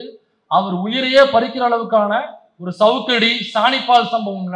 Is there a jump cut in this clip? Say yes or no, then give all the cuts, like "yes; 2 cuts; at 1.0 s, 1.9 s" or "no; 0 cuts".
no; 0 cuts